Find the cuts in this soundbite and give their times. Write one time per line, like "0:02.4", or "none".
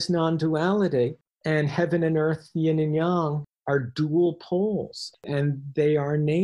0:01.3
0:03.5
0:05.2